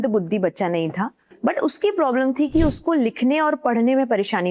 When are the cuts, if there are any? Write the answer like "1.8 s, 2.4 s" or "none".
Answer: 1.3 s